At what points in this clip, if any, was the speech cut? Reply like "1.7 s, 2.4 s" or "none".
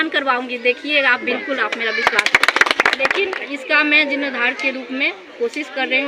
3.0 s